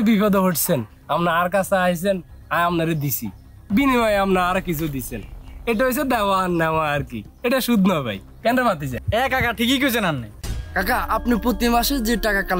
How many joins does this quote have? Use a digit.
1